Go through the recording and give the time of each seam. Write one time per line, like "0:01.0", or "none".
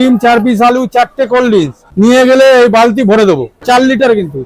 0:01.8
0:03.6